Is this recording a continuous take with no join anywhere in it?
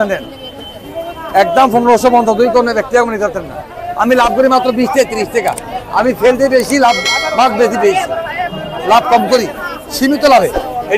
yes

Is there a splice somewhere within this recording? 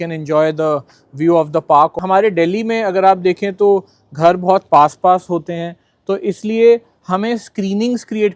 yes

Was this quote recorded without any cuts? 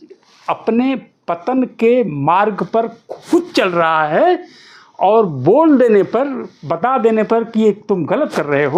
yes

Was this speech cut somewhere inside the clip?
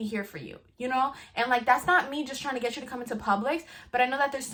no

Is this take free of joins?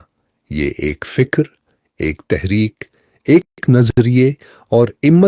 yes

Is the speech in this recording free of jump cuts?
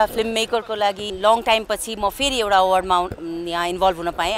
no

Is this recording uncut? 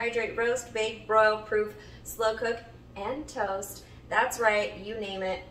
yes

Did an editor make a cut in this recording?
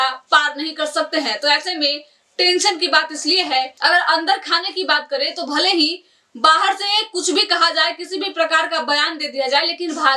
yes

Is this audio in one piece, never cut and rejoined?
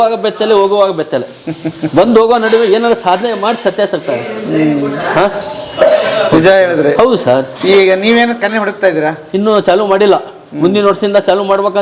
yes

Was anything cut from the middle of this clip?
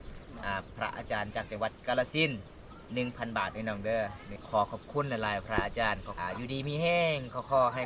yes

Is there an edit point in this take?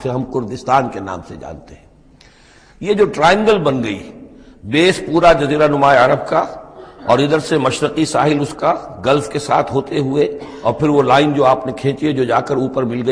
no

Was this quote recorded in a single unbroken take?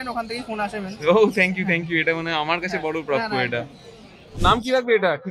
no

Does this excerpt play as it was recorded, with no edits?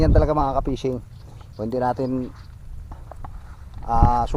yes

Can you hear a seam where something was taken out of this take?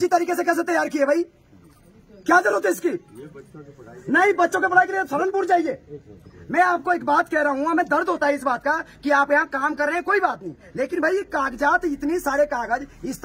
no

